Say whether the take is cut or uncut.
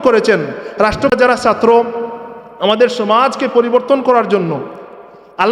cut